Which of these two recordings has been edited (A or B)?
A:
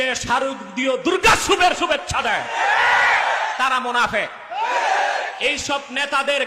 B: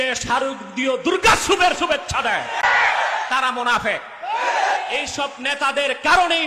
B